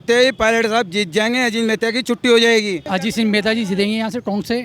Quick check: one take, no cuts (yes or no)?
no